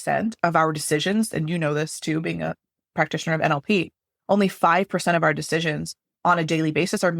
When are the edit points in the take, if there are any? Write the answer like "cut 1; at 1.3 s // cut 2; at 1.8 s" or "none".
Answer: none